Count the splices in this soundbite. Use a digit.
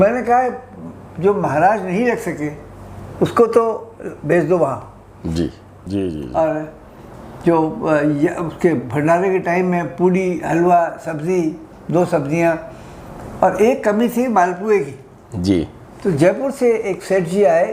1